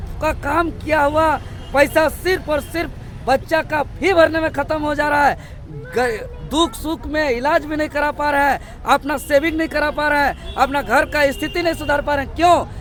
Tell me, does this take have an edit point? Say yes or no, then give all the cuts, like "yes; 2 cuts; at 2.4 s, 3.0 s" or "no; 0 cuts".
no; 0 cuts